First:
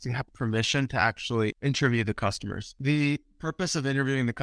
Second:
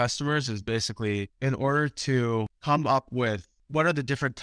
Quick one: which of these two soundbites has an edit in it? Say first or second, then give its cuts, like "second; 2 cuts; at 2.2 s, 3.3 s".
first; 2 cuts; at 1.5 s, 2.8 s